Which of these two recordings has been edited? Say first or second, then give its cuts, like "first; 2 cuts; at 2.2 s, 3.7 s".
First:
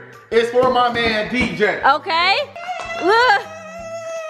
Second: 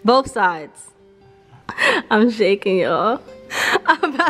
first; 1 cut; at 2.6 s